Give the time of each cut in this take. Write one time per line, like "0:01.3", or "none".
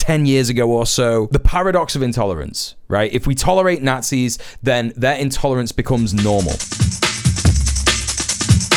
none